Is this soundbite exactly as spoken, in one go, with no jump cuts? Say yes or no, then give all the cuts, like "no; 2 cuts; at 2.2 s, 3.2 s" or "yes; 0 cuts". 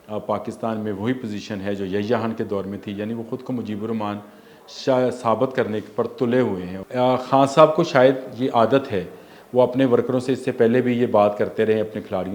no; 1 cut; at 6.7 s